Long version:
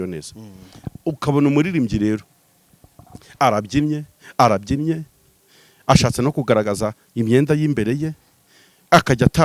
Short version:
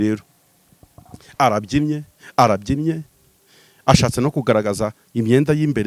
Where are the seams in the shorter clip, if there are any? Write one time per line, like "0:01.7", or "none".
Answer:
none